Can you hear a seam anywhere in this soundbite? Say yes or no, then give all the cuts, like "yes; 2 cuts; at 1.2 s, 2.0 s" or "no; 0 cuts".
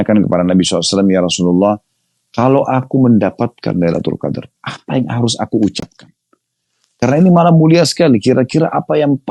no; 0 cuts